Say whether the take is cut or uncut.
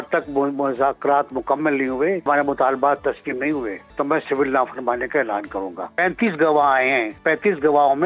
cut